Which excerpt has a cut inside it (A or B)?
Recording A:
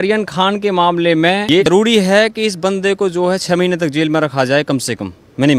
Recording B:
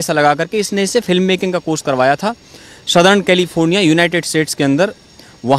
A